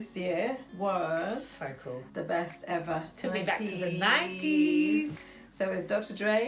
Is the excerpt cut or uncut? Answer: cut